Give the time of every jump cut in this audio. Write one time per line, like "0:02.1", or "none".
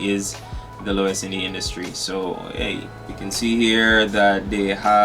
0:03.0

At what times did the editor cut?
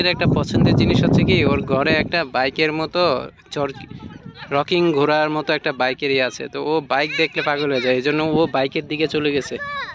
none

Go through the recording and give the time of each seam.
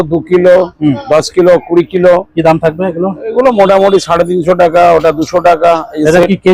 none

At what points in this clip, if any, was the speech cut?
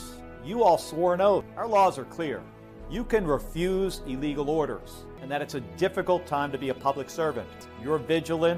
0:01.5
0:05.2
0:07.5

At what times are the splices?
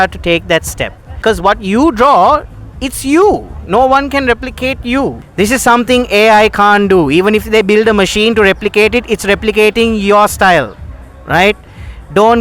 0:01.2
0:05.2

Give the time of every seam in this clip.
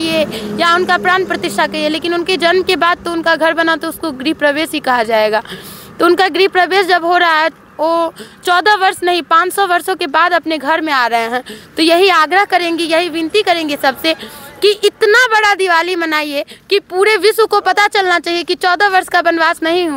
none

